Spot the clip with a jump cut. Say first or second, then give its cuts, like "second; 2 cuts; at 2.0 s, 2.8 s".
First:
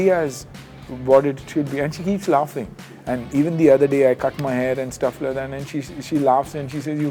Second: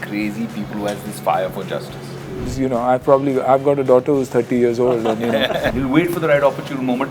second; 2 cuts; at 2.5 s, 5.7 s